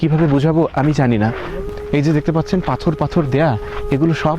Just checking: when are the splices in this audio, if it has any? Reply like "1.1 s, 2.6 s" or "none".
1.6 s